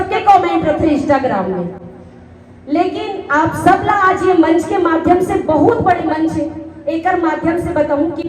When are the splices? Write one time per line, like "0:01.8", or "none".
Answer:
none

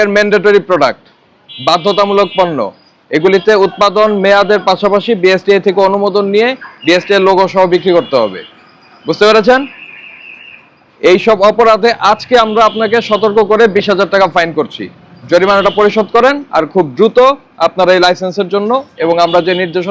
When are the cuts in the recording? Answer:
none

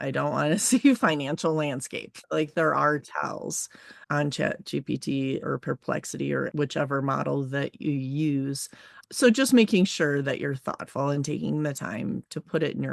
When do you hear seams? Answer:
0:02.2
0:06.5

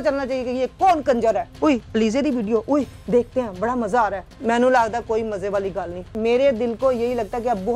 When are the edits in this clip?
0:01.5
0:04.3
0:06.1

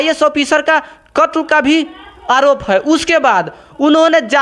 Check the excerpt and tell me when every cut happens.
none

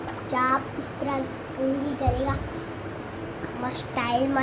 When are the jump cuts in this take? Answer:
none

